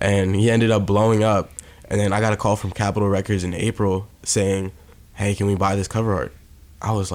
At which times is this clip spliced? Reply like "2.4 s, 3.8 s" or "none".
2.7 s